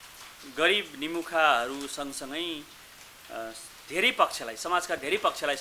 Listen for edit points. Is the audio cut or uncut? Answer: uncut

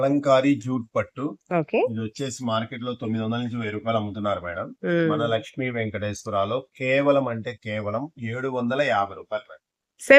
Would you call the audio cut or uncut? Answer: uncut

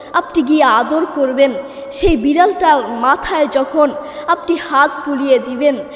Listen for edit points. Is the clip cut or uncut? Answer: uncut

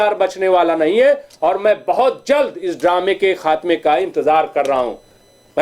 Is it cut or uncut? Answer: uncut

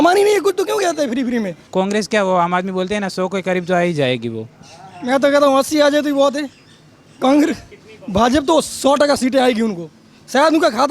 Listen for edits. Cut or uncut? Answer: cut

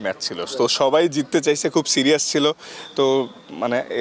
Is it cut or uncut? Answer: uncut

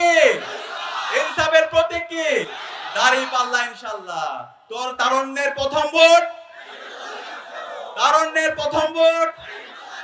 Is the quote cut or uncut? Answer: uncut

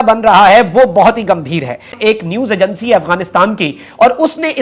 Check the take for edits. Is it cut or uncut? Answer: uncut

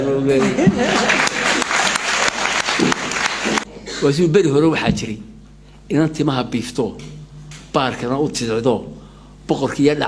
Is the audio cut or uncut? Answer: cut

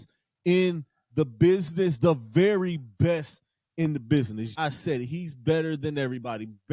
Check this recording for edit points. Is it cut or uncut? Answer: cut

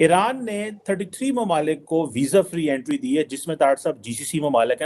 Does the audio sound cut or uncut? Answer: uncut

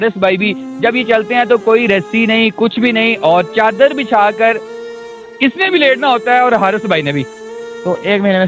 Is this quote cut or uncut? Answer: cut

